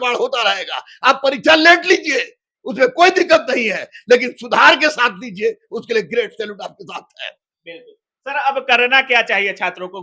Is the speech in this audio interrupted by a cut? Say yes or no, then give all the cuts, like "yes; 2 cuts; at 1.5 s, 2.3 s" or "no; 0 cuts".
no; 0 cuts